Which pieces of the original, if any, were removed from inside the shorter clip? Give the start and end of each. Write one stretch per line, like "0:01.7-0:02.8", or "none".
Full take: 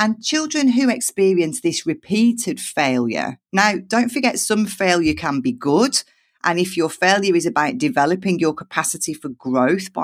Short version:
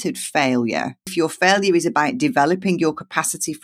0:03.5-0:06.7

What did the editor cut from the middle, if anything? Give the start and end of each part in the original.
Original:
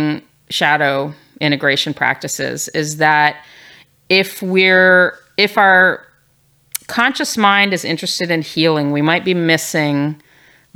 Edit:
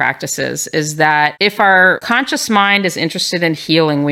0:03.4-0:05.3
0:06.0-0:06.9

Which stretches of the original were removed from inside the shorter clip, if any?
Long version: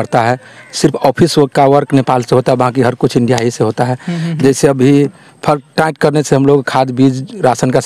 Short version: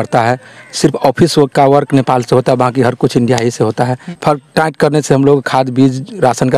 0:04.1-0:05.3

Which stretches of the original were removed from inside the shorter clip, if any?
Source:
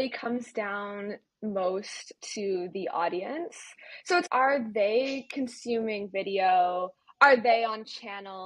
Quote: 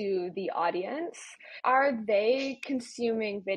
0:04.0-0:04.3

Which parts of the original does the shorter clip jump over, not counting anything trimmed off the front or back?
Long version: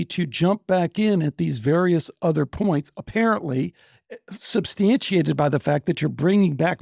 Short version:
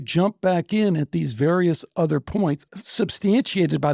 0:03.0-0:04.3

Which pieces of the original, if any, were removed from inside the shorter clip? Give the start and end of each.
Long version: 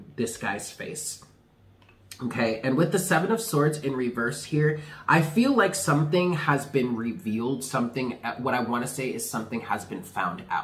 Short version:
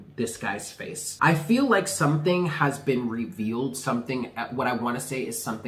0:01.0-0:04.9

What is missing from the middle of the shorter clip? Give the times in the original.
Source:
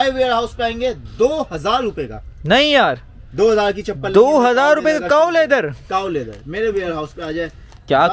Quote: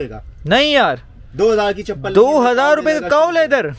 none

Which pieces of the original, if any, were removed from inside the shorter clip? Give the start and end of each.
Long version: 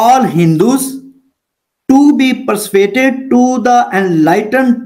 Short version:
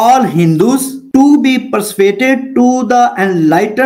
0:01.0-0:01.7

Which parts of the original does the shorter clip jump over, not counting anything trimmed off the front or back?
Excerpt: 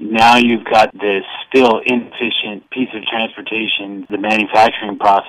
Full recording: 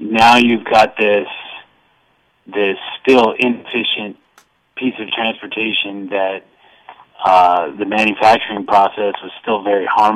0:00.9-0:02.5
0:04.2-0:04.7
0:06.1-0:07.7

